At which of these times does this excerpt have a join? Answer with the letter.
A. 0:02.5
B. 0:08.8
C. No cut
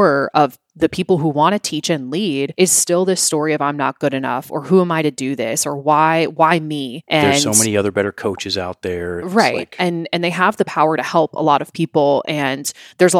A